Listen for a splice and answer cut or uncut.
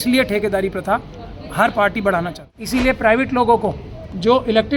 cut